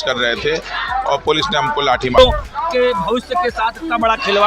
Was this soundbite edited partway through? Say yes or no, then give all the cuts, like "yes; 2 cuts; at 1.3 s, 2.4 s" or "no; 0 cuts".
yes; 1 cut; at 2.2 s